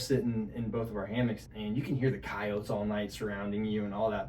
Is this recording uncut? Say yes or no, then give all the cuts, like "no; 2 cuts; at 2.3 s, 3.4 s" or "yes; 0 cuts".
no; 1 cut; at 1.4 s